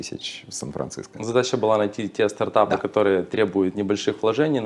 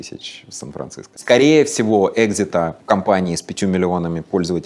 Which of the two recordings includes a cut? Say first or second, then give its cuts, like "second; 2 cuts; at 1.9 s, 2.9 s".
second; 2 cuts; at 1.1 s, 2.8 s